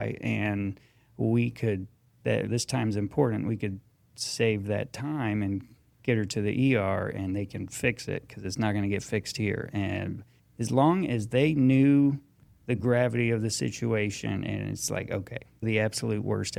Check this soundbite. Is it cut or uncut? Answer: uncut